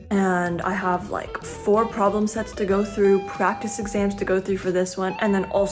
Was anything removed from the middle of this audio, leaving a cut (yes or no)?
no